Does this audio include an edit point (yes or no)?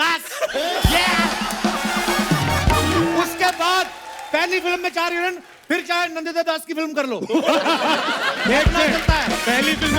no